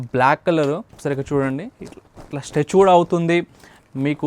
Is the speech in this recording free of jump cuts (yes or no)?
no